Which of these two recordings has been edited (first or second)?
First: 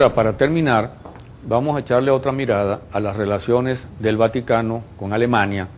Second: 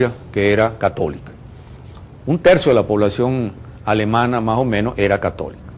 second